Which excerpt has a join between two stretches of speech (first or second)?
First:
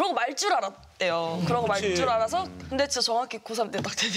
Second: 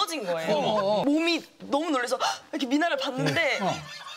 second